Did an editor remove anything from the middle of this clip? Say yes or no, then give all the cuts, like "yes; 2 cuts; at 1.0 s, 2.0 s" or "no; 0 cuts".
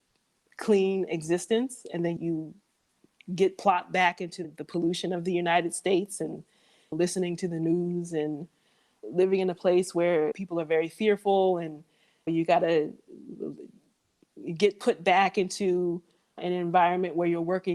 yes; 2 cuts; at 2.2 s, 4.5 s